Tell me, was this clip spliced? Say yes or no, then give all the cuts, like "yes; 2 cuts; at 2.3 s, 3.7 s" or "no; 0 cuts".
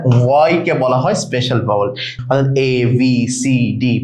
yes; 1 cut; at 2.1 s